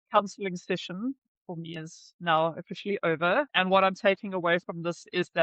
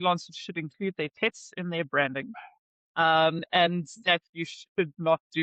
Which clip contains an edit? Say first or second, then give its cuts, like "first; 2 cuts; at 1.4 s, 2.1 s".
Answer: first; 1 cut; at 3.5 s